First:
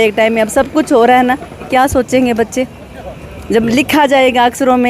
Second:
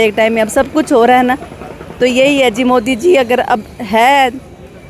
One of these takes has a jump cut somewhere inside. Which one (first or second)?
first